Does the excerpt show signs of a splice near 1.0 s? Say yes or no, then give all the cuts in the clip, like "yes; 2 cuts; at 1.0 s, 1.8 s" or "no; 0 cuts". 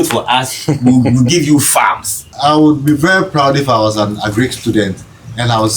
no; 1 cut; at 2.3 s